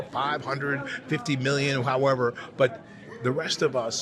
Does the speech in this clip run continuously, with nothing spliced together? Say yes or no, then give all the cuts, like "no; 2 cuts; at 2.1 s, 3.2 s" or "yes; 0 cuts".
yes; 0 cuts